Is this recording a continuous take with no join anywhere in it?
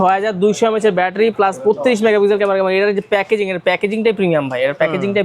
yes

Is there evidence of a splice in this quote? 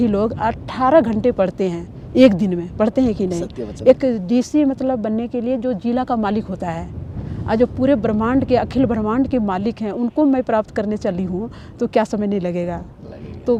no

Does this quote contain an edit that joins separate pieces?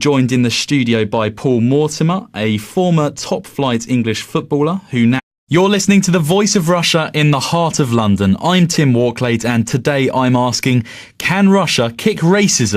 no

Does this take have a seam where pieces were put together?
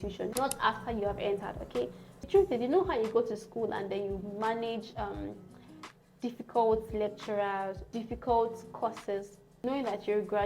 yes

